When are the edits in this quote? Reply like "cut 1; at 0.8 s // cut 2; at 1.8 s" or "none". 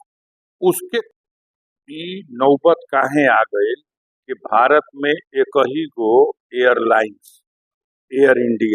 cut 1; at 1.1 s